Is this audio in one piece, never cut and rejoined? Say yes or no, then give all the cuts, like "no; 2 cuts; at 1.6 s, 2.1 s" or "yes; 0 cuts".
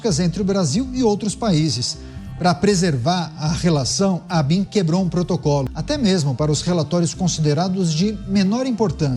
no; 1 cut; at 5.7 s